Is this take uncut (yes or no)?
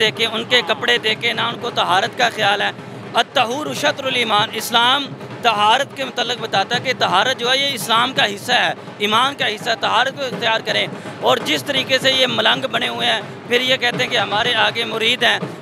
yes